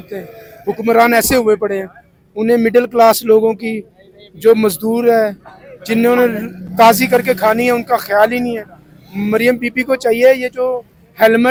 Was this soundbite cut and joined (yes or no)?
no